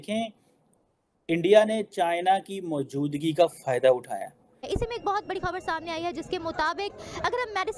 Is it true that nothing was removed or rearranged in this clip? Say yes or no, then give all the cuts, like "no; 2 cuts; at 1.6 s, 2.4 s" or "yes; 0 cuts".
no; 1 cut; at 4.6 s